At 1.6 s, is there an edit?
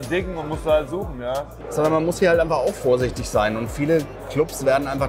yes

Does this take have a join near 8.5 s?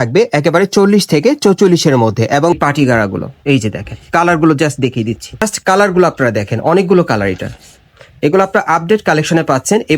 no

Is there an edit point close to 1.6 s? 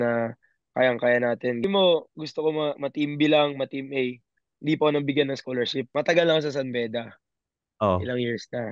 yes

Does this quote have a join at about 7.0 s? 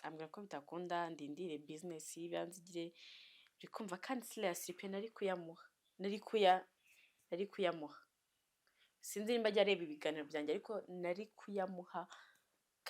no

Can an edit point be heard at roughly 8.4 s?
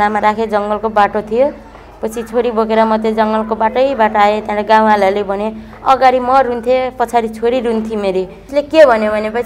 yes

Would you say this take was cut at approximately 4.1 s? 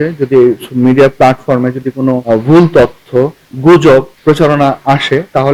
yes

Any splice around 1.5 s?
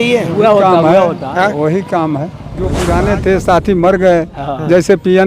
no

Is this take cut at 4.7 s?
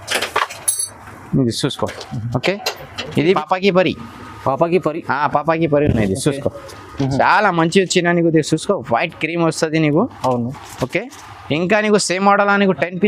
no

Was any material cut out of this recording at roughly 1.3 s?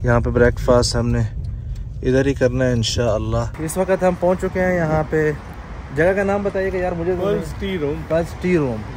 no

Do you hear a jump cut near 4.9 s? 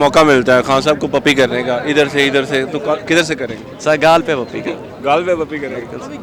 no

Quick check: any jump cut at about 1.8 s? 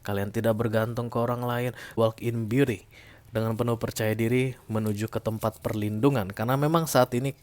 yes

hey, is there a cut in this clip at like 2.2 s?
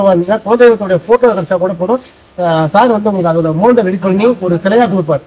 no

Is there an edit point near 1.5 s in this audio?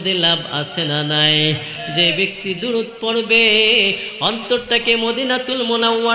no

